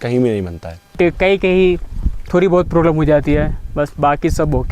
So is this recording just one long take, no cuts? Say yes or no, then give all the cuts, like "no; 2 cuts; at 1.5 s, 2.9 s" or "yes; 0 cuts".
no; 1 cut; at 0.9 s